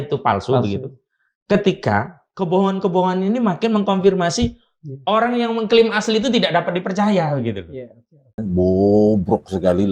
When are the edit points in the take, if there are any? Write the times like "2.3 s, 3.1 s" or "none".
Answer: 8.4 s